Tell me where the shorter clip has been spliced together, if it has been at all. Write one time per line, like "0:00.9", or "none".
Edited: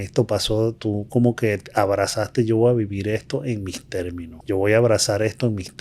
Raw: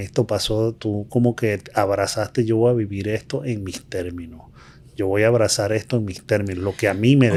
0:04.3